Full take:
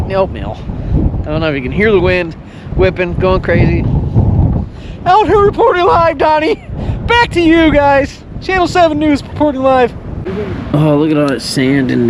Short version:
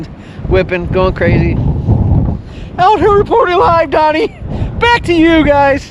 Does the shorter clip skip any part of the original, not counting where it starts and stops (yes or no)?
no